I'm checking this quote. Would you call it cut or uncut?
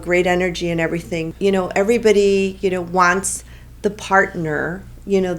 cut